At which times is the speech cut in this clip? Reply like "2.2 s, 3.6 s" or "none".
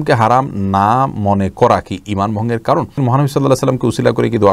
3.0 s